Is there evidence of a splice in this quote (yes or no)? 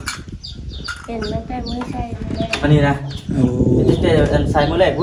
no